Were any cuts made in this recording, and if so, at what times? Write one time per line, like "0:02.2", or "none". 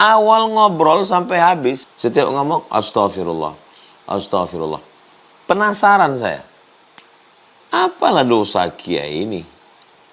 0:01.9